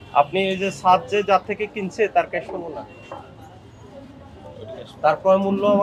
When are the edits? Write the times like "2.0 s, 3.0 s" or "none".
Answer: none